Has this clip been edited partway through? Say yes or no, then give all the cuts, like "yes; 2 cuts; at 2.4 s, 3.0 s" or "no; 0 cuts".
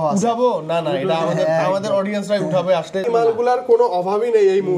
yes; 1 cut; at 3.1 s